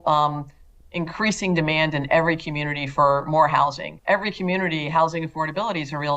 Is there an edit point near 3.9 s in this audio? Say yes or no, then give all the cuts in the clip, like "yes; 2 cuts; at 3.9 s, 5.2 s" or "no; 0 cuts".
yes; 1 cut; at 3.9 s